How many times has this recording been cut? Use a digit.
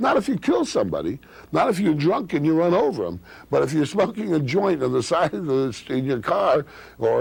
0